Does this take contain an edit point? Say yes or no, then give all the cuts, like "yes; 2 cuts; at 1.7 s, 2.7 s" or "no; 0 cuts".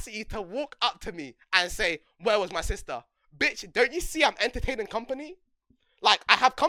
no; 0 cuts